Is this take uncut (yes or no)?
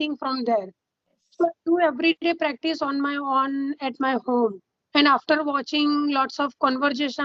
no